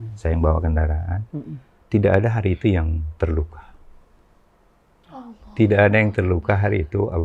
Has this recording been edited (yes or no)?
no